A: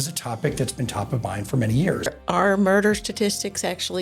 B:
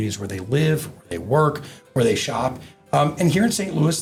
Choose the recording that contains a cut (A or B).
A